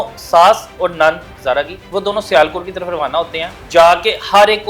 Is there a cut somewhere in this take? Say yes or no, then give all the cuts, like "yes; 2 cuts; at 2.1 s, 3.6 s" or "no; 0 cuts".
yes; 2 cuts; at 1.4 s, 3.6 s